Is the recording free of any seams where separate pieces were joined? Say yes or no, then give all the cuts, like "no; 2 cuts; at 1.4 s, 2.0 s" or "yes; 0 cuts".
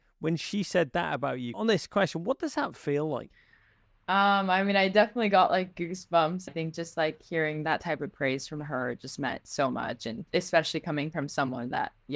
no; 3 cuts; at 1.5 s, 6.5 s, 10.1 s